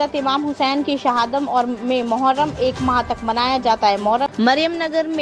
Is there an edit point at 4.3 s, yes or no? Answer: yes